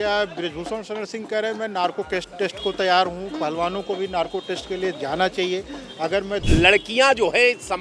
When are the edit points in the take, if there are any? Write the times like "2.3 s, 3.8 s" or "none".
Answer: 6.4 s

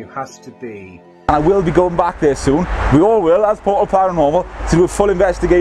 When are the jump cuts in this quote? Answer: 1.2 s

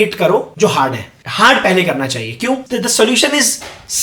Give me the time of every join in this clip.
1.1 s, 2.7 s

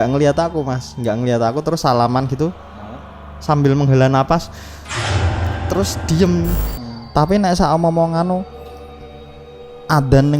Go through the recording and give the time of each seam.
6.6 s

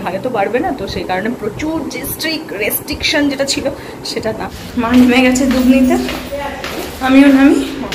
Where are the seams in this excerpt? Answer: 4.5 s

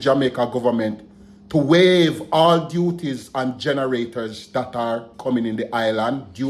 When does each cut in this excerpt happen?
none

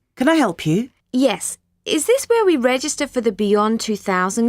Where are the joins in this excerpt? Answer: 1.0 s

